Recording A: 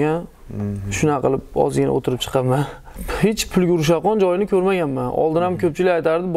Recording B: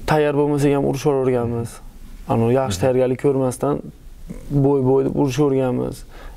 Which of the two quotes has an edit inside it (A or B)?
A